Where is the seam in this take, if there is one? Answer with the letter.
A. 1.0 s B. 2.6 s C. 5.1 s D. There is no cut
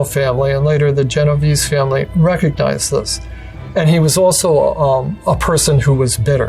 C